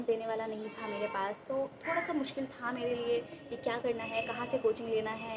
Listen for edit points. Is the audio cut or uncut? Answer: uncut